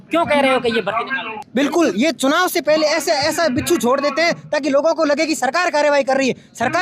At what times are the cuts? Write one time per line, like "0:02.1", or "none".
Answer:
0:01.3